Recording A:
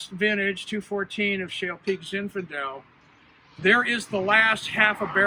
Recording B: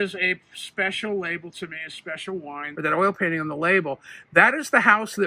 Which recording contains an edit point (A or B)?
B